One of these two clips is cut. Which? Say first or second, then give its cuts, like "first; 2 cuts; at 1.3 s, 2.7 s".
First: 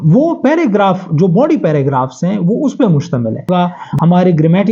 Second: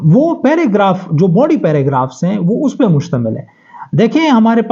first; 1 cut; at 3.5 s